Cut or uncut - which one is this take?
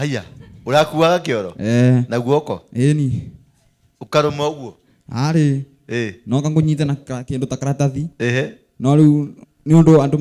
uncut